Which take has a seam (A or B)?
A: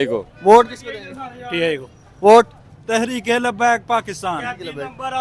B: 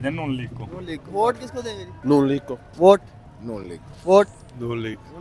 B